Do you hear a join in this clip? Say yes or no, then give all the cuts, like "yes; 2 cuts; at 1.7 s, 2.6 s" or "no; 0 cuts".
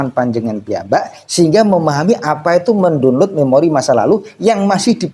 no; 0 cuts